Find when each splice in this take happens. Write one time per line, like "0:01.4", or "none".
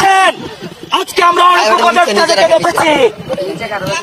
none